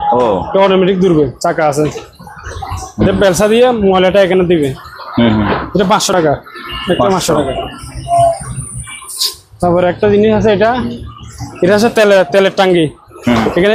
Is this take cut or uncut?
uncut